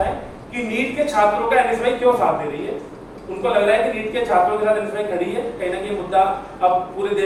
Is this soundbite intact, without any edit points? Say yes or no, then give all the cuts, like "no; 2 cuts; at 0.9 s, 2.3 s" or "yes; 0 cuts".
yes; 0 cuts